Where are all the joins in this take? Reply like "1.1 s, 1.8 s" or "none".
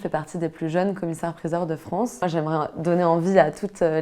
2.2 s